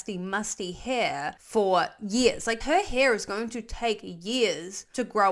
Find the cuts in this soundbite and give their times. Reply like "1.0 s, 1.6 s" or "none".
1.4 s, 2.6 s